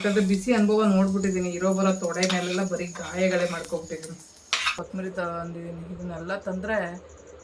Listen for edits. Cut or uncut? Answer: cut